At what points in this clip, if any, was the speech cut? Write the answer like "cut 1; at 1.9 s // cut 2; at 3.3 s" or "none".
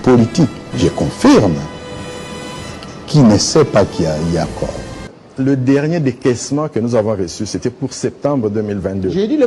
cut 1; at 4.8 s